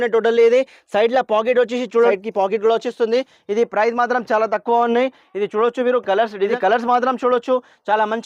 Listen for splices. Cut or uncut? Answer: cut